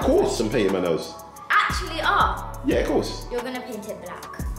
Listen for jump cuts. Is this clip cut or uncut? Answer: uncut